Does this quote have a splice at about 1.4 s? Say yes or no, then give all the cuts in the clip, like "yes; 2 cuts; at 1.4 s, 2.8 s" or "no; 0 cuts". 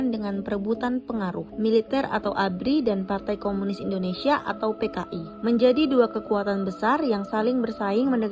yes; 1 cut; at 1.4 s